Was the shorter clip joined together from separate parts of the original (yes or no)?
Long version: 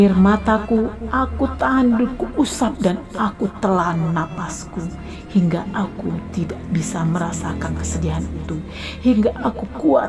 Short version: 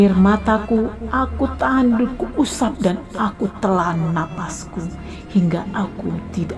no